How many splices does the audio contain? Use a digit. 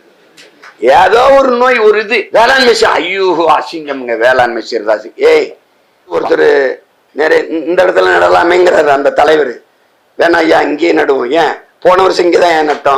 2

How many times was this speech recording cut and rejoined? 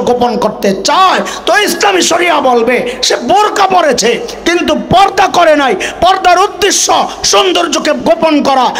0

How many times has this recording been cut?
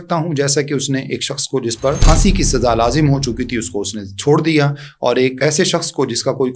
2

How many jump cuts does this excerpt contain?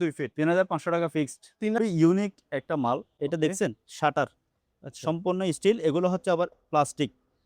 1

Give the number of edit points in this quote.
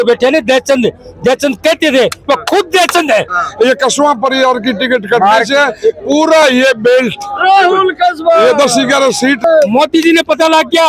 2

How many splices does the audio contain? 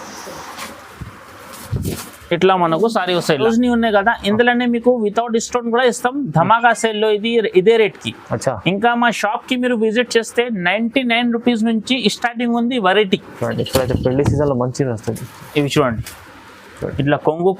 2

